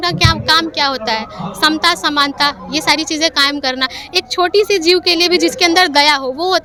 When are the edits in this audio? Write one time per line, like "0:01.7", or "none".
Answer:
none